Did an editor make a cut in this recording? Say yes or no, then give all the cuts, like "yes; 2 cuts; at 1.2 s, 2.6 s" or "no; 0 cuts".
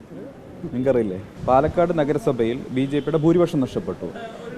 yes; 1 cut; at 1.3 s